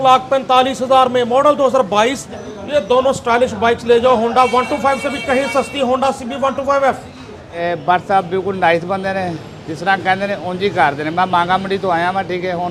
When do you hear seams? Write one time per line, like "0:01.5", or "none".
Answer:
0:02.2
0:07.6